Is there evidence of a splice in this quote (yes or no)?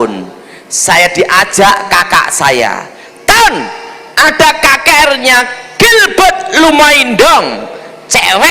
no